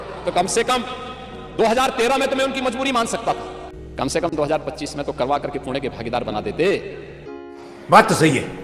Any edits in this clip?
no; 0 cuts

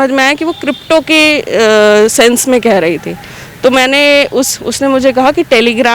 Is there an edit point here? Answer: no; 0 cuts

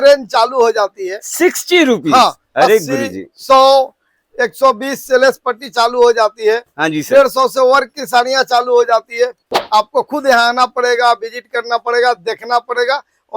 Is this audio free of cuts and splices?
no; 1 cut; at 9.5 s

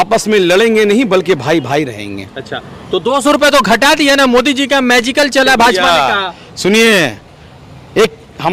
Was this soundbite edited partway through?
no; 0 cuts

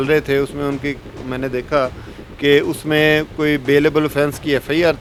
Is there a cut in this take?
no; 0 cuts

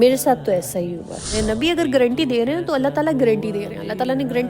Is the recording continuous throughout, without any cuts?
no; 1 cut; at 1.3 s

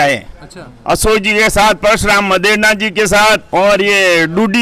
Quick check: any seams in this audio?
no; 0 cuts

